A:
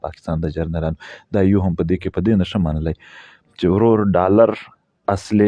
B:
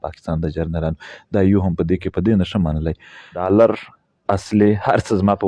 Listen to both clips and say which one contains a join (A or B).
B